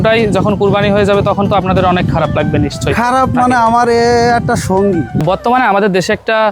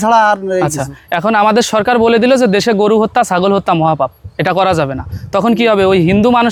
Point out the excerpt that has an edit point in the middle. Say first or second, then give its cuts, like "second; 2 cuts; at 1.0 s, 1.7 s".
first; 1 cut; at 5.2 s